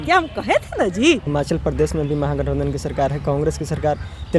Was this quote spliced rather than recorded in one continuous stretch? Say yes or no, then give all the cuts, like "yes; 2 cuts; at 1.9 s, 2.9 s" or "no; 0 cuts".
yes; 1 cut; at 1.3 s